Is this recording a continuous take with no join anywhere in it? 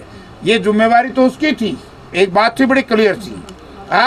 no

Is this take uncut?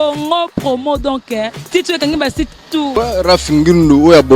no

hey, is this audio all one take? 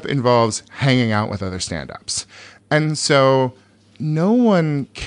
yes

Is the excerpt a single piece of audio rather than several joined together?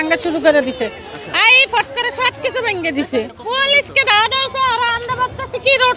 yes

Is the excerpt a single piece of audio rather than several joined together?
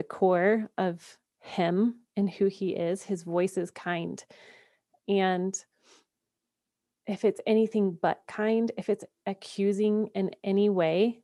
yes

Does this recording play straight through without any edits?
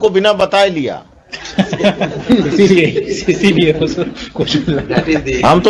yes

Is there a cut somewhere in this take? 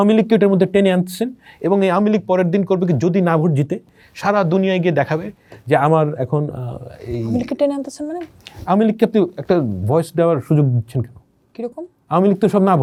no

